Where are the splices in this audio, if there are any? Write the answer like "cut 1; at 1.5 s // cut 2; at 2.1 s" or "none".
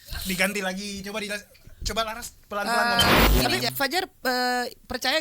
cut 1; at 3.3 s